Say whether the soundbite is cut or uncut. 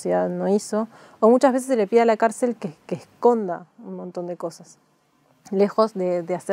uncut